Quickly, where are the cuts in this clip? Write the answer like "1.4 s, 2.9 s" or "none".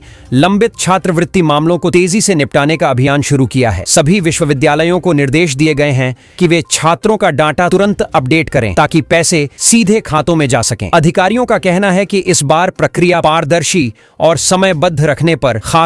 none